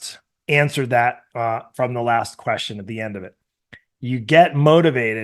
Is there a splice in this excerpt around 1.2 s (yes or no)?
no